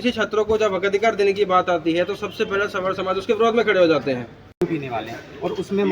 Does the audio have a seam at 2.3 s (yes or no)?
no